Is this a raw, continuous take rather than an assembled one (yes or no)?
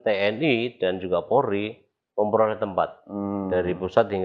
yes